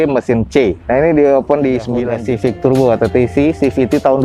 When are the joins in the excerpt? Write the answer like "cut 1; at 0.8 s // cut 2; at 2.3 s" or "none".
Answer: cut 1; at 2.0 s